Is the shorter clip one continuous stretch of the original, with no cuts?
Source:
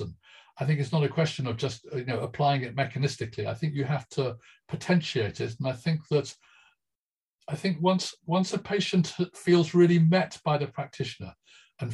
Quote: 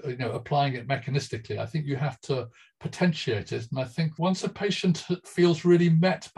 no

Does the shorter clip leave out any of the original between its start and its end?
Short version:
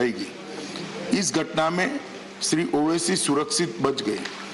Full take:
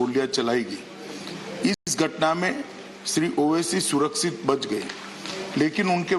yes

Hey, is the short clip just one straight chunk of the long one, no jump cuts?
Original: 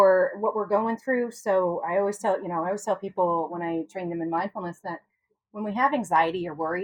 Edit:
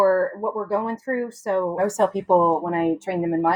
no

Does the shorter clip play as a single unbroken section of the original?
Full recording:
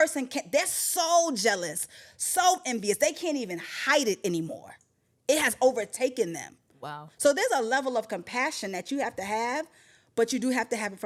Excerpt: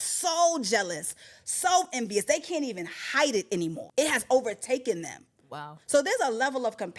no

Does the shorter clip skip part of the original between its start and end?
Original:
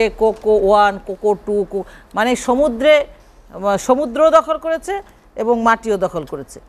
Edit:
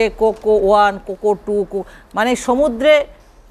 no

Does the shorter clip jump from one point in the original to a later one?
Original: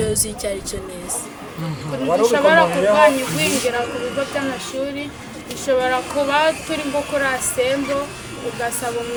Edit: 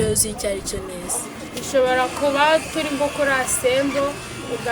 yes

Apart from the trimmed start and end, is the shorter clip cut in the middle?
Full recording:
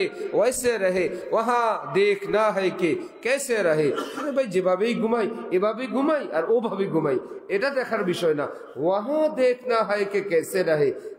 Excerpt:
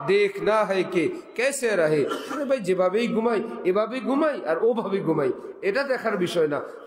no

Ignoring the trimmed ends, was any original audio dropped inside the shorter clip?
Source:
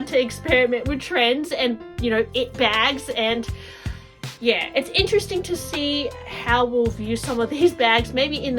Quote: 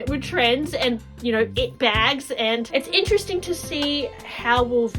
yes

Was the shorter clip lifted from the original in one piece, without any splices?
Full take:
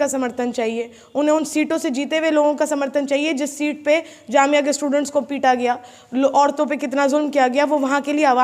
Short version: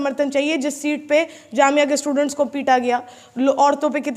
yes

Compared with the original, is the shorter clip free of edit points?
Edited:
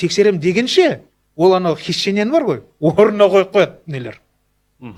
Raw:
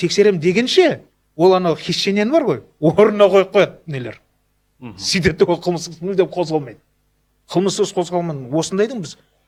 yes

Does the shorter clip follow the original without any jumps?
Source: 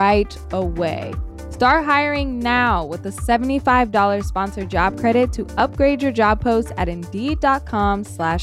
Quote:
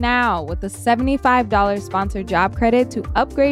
yes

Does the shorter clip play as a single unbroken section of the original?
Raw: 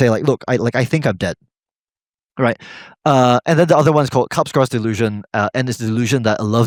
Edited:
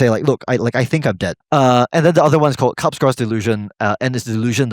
no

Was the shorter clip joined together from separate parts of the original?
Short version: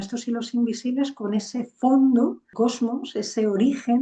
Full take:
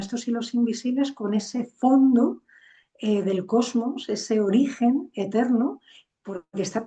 yes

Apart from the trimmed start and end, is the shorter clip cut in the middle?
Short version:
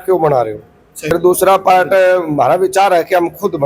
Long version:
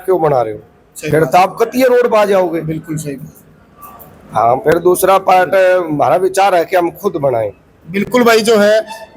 yes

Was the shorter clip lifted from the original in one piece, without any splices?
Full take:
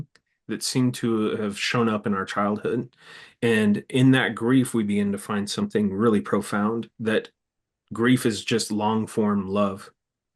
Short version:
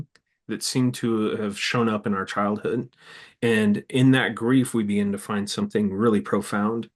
yes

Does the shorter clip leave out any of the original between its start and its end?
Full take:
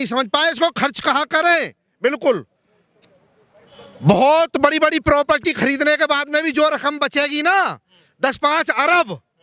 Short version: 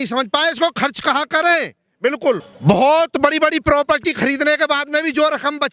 yes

